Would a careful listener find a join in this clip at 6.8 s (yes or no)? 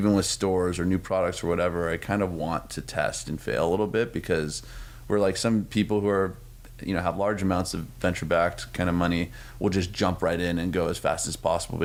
no